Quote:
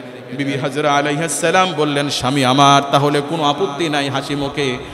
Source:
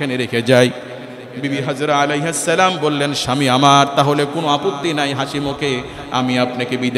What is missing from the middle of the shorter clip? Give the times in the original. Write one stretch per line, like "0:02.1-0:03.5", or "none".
none